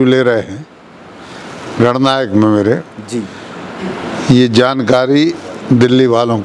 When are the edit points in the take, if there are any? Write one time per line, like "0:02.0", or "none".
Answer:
none